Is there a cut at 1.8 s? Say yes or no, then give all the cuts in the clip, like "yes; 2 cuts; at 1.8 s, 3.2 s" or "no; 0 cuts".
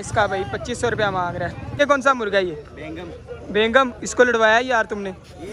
yes; 1 cut; at 1.8 s